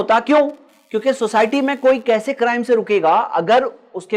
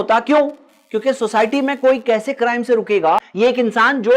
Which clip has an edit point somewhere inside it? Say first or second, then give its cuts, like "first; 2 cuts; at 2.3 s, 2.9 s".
second; 1 cut; at 3.0 s